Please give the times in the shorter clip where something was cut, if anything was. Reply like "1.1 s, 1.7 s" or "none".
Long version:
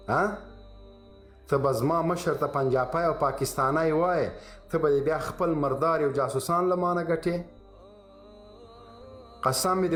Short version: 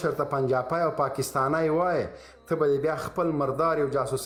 none